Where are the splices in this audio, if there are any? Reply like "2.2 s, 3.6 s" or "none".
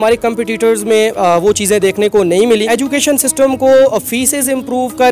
2.7 s